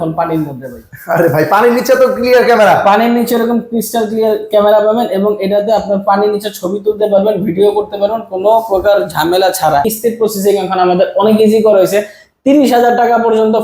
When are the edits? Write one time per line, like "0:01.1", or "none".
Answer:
0:09.9